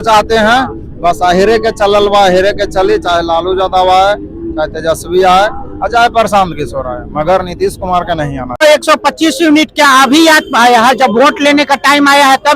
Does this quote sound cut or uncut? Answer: cut